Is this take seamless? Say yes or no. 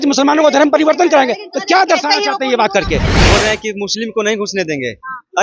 no